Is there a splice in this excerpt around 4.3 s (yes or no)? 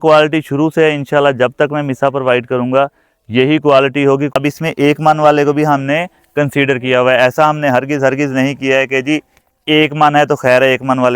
yes